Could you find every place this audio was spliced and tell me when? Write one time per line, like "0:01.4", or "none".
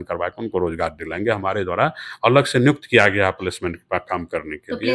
none